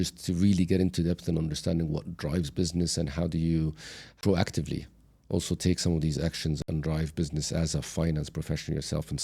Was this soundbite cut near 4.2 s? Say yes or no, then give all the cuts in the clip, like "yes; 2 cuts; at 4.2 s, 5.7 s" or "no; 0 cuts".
yes; 2 cuts; at 4.2 s, 6.6 s